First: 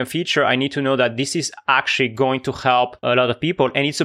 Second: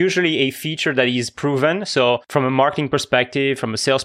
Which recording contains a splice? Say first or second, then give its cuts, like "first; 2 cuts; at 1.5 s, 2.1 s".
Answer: second; 1 cut; at 2.2 s